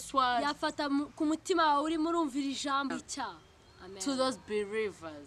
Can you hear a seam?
yes; 1 cut; at 2.9 s

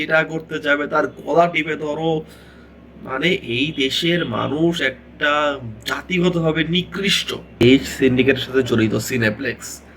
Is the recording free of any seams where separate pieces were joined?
no; 1 cut; at 7.5 s

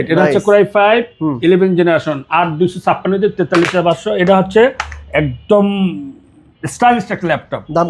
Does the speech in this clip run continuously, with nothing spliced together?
yes; 0 cuts

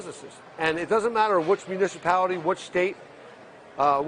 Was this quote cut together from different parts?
no; 0 cuts

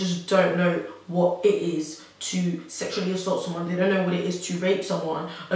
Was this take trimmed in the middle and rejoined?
no; 0 cuts

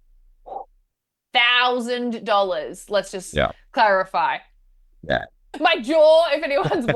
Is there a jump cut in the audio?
yes; 1 cut; at 5.4 s

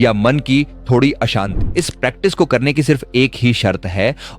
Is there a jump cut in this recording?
yes; 1 cut; at 1.6 s

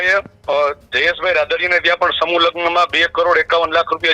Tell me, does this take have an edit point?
no; 0 cuts

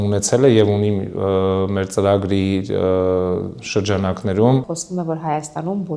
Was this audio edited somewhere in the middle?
yes; 1 cut; at 4.8 s

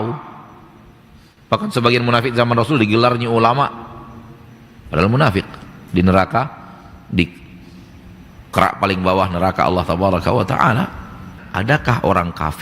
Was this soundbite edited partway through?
yes; 1 cut; at 11.4 s

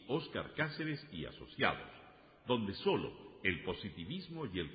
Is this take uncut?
yes; 0 cuts

